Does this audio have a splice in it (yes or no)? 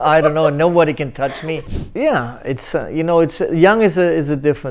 yes